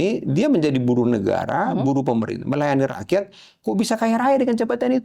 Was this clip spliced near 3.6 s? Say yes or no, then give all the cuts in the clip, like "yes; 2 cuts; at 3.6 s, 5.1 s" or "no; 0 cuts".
no; 0 cuts